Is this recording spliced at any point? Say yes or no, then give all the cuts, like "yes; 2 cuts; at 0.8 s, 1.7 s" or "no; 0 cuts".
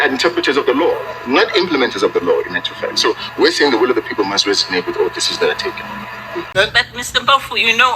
yes; 1 cut; at 6.5 s